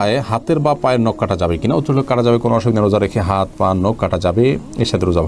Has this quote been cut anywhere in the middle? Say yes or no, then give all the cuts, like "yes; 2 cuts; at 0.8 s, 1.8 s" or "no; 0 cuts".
no; 0 cuts